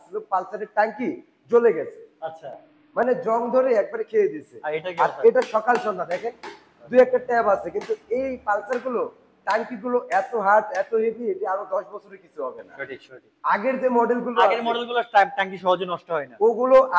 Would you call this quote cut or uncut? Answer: uncut